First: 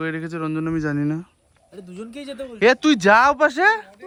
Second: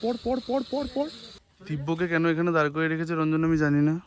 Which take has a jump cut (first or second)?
second